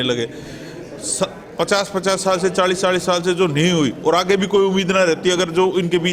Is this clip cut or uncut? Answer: uncut